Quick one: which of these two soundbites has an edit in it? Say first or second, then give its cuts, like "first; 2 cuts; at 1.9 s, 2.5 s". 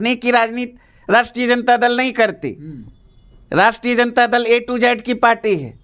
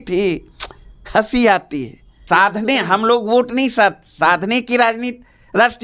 second; 1 cut; at 2.2 s